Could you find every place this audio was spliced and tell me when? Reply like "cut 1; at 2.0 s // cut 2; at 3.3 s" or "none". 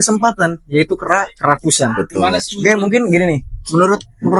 none